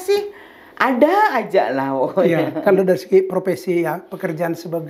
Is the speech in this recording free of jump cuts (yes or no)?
yes